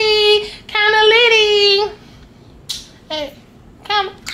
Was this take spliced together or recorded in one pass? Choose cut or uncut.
uncut